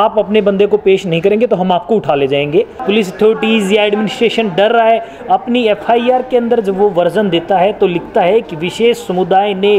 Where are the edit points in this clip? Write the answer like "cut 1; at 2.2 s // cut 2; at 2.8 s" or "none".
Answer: cut 1; at 2.8 s

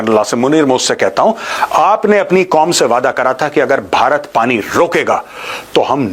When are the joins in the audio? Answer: cut 1; at 1.5 s

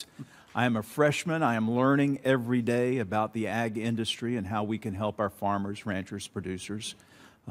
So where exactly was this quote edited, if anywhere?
cut 1; at 1.3 s // cut 2; at 6.3 s

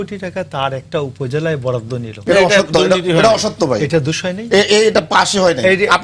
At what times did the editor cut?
none

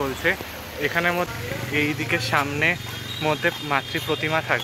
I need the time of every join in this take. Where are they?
cut 1; at 1.3 s

